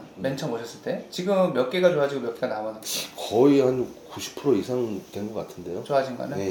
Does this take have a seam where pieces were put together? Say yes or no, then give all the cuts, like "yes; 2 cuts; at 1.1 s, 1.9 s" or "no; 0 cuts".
no; 0 cuts